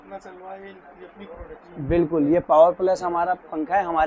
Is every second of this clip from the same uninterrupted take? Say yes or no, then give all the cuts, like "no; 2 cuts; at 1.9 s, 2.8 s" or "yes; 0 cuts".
yes; 0 cuts